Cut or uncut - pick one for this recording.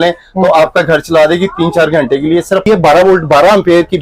cut